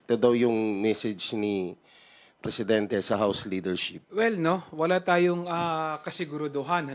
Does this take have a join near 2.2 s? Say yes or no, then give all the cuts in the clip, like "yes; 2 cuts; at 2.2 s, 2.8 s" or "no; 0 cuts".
no; 1 cut; at 3.9 s